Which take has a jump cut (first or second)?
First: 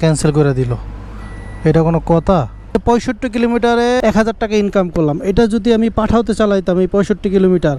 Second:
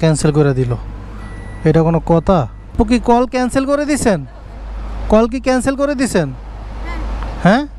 first